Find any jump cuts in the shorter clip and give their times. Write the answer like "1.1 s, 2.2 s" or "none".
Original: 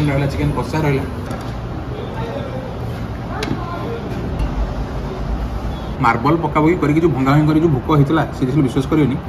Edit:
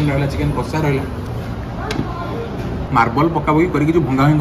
1.3 s, 2.9 s